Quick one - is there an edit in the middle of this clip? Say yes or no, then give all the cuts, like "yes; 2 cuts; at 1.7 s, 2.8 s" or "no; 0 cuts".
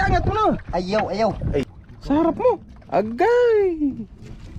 yes; 1 cut; at 1.7 s